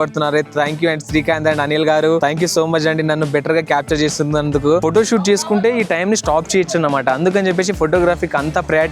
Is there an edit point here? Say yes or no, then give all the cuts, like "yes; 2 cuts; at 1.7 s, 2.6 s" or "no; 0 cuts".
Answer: yes; 1 cut; at 4.8 s